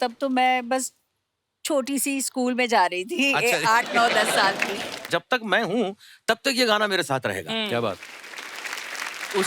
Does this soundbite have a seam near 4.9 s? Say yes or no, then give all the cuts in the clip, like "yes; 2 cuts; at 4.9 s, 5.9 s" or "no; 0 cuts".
yes; 1 cut; at 4.9 s